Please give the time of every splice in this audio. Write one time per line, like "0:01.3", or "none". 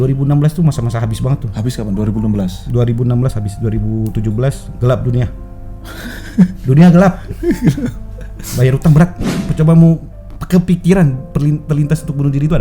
0:09.3